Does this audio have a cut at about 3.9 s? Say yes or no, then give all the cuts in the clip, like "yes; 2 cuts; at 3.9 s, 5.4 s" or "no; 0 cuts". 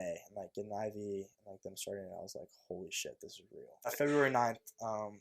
yes; 1 cut; at 3.9 s